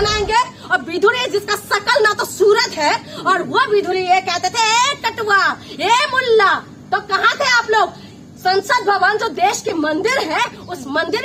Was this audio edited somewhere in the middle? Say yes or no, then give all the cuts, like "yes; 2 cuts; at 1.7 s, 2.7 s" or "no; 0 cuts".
no; 0 cuts